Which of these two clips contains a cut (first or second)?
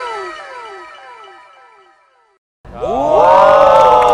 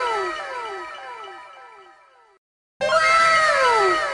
second